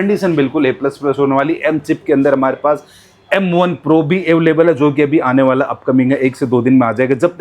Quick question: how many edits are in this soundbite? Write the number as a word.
zero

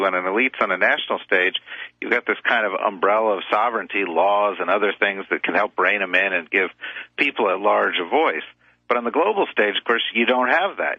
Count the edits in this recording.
zero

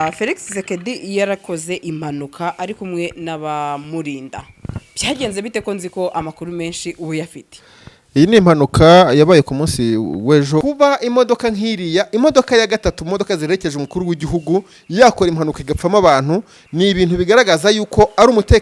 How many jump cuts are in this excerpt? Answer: one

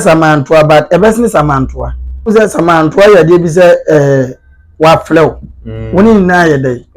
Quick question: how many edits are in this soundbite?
one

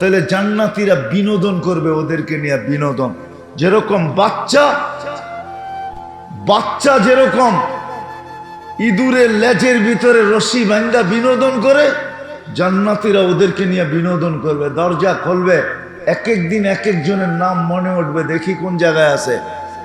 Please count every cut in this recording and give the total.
two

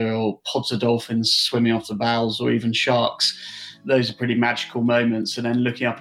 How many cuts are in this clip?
one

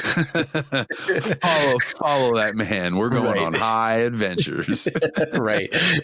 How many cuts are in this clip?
zero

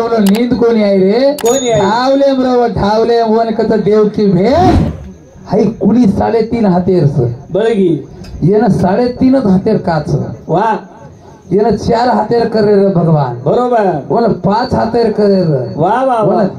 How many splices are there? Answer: one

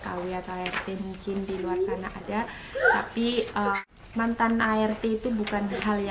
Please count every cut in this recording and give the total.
one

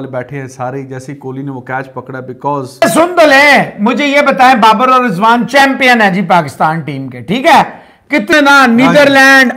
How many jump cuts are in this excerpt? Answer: two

